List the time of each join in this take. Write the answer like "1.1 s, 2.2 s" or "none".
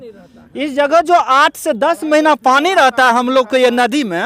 none

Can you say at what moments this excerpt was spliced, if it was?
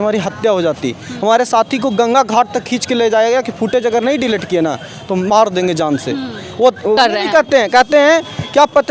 7.0 s

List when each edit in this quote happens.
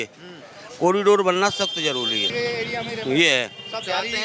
none

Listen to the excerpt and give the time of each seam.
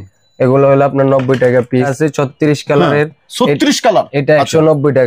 1.9 s

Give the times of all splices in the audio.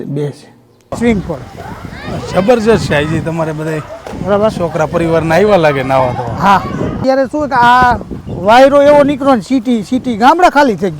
1.0 s, 7.0 s

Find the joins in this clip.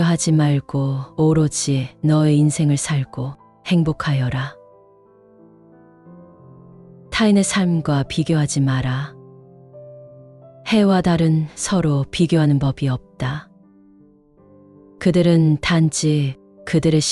none

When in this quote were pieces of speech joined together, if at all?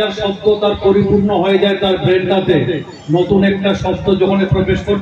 none

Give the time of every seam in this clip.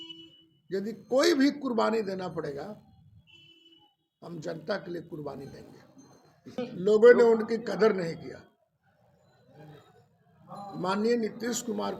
6.6 s

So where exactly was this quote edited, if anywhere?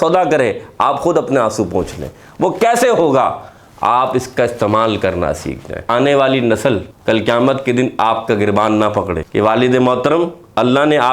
5.9 s, 6.9 s, 9.2 s

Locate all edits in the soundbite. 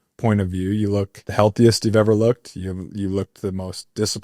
1.2 s

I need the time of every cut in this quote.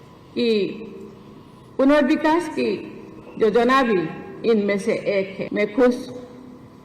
5.4 s

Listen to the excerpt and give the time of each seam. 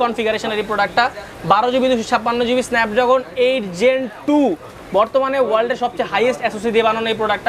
none

